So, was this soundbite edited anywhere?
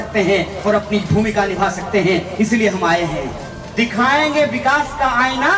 yes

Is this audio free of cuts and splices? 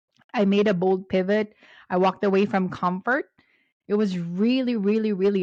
yes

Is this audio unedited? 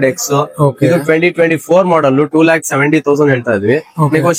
yes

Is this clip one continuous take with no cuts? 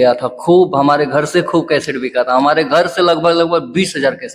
yes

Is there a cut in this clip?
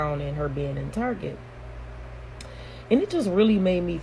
no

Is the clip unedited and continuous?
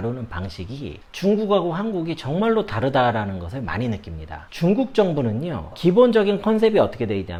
yes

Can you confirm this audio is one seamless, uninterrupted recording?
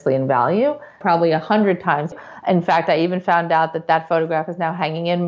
no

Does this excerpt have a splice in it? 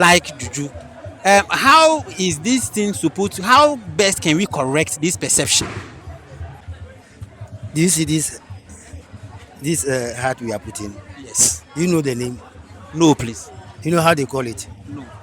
yes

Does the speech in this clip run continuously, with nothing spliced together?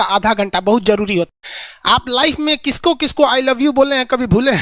no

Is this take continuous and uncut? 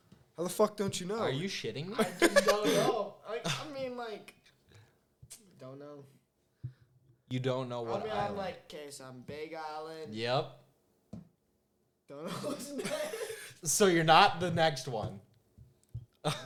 yes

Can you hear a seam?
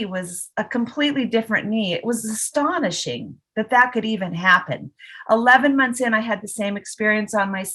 no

